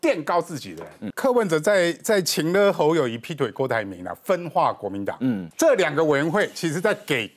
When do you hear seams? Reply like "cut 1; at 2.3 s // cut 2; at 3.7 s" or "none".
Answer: cut 1; at 1.1 s // cut 2; at 5.5 s